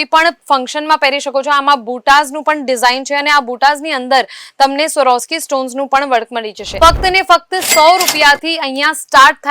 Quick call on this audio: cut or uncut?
cut